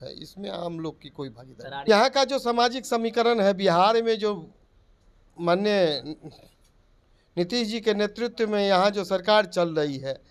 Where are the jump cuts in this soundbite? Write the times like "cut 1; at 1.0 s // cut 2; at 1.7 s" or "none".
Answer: cut 1; at 1.9 s